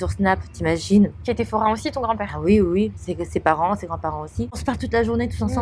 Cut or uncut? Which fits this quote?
uncut